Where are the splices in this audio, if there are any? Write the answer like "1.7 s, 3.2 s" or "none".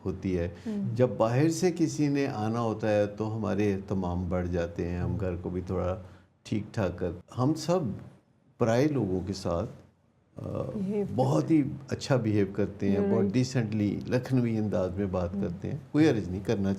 7.2 s